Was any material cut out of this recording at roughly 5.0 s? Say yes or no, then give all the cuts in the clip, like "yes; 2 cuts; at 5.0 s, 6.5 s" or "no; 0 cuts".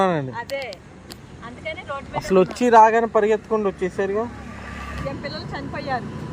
yes; 1 cut; at 5.0 s